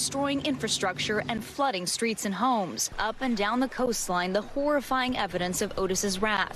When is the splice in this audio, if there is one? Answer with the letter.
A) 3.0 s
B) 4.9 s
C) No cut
B